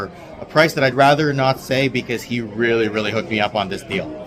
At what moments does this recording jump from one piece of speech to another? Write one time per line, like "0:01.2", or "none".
none